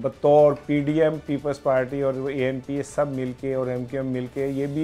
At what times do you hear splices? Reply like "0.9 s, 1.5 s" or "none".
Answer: none

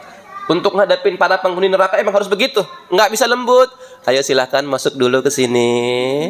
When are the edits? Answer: none

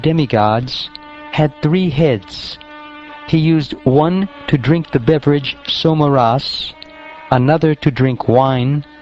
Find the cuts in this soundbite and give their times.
7.3 s

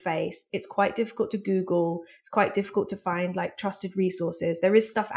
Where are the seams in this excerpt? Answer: none

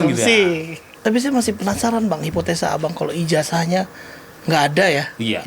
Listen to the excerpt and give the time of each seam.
1.0 s

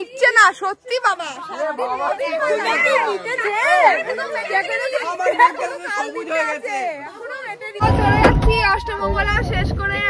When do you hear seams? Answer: 7.8 s

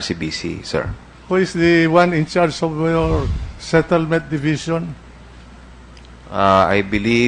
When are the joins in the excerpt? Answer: 2.4 s

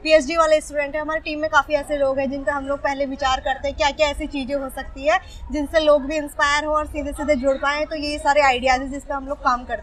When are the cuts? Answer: none

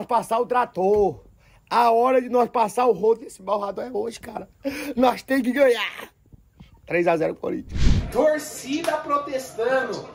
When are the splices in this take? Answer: 7.9 s

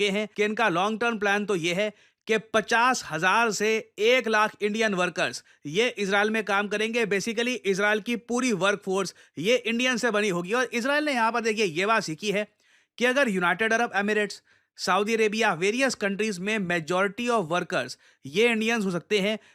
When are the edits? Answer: none

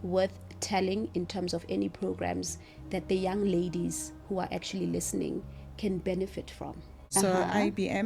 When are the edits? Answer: 7.0 s

